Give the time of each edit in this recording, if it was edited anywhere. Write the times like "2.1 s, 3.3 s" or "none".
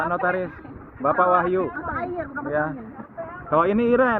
none

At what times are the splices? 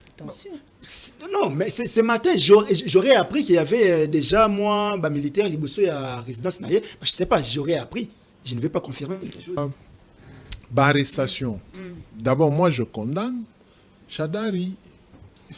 9.6 s

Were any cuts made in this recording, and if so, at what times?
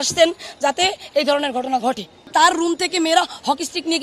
2.3 s

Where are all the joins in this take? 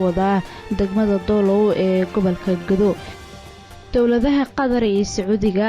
3.6 s

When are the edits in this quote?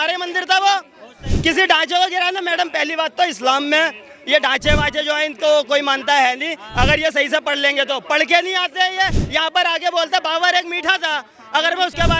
none

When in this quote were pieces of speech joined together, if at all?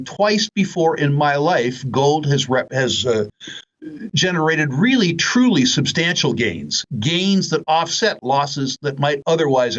none

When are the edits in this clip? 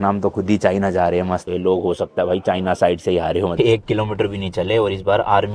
1.4 s, 3.5 s

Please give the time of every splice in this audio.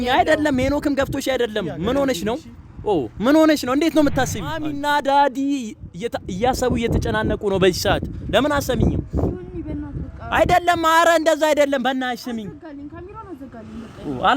4.7 s

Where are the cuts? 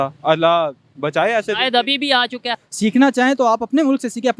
2.5 s

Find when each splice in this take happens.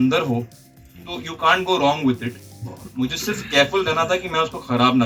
none

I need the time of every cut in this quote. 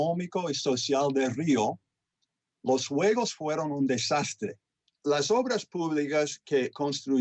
4.9 s

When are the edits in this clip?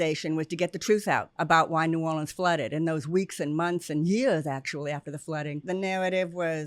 1.3 s, 5.6 s

